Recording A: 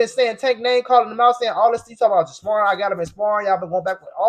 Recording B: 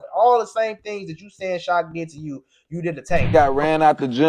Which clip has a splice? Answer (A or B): B